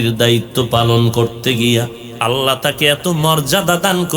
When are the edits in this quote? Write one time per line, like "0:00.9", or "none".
0:02.0